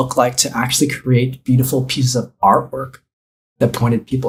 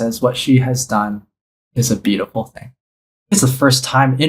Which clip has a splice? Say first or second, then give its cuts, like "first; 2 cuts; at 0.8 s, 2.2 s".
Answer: second; 1 cut; at 3.3 s